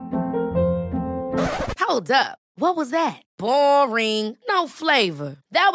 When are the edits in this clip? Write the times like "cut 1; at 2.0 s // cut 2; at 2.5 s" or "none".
none